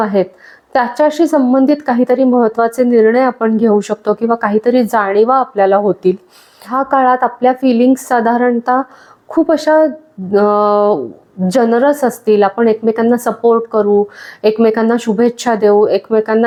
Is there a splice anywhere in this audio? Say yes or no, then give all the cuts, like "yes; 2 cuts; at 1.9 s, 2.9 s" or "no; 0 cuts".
no; 0 cuts